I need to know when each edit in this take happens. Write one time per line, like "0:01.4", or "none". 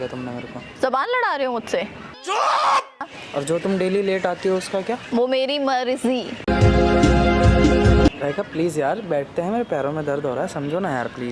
0:03.2
0:08.2